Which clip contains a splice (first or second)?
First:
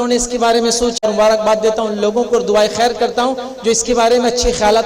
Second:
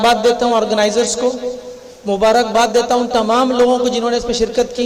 first